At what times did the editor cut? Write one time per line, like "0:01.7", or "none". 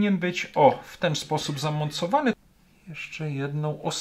0:02.3